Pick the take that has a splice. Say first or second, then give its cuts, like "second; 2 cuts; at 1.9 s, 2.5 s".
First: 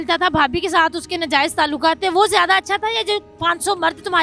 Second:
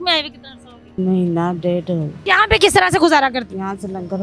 second; 3 cuts; at 1.0 s, 2.1 s, 3.5 s